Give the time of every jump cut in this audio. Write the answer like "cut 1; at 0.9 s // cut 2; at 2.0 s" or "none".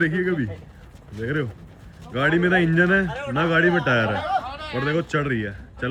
none

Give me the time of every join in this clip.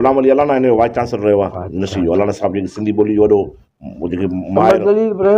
none

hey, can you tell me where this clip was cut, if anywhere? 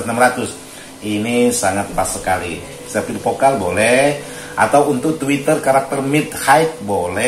cut 1; at 2.8 s

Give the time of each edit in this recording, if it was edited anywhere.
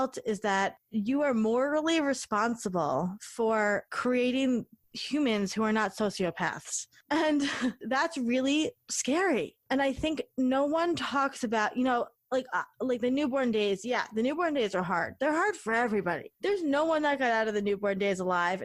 cut 1; at 3.9 s // cut 2; at 8.9 s

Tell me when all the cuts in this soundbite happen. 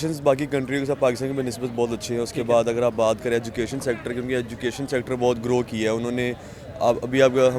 none

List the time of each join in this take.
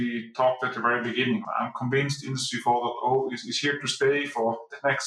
cut 1; at 1.4 s

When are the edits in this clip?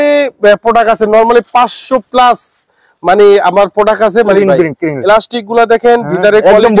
cut 1; at 4.4 s

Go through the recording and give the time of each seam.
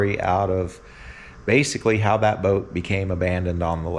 none

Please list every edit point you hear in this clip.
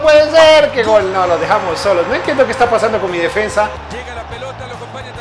cut 1; at 3.9 s

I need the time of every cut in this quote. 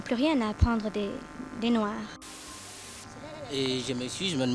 cut 1; at 2.7 s

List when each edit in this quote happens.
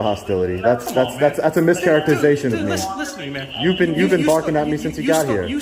none

